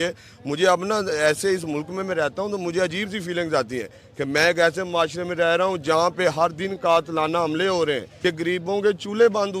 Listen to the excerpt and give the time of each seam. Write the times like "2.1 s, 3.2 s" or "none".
8.1 s